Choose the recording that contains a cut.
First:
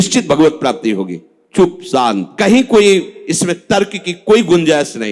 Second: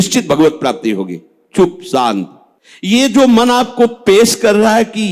second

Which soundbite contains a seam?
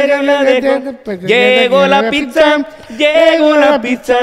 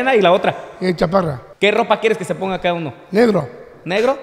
second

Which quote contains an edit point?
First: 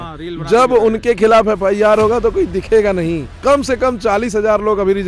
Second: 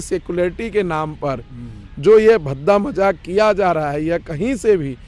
first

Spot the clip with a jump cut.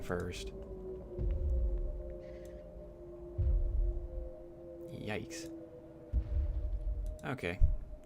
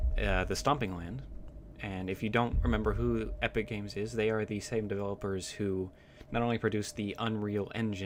first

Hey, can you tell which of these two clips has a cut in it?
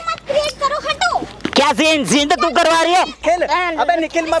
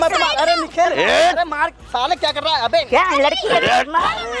first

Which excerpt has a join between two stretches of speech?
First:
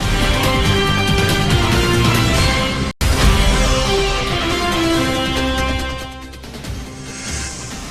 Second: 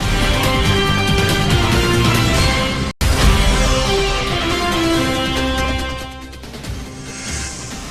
second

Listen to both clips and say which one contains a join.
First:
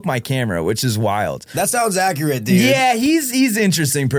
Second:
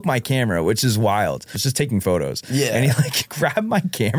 second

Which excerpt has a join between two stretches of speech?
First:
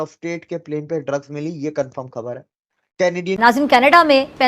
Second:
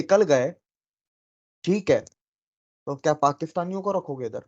first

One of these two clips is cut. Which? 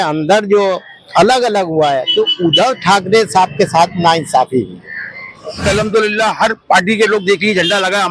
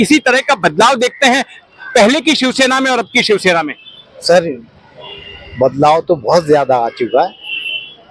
first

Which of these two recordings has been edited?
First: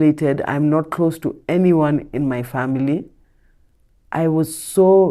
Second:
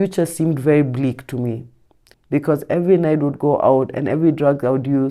second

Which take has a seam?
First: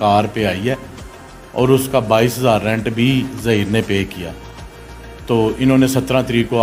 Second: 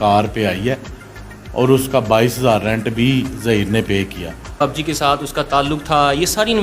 second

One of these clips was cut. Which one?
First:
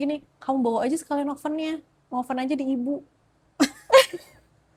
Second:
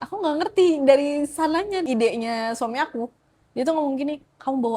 second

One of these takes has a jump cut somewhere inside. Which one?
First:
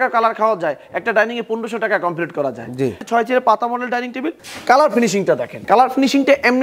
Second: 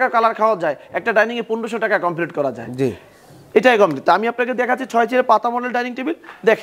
first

